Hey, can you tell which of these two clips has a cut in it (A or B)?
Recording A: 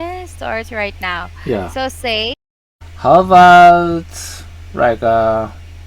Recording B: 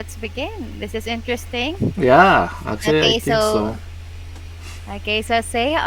A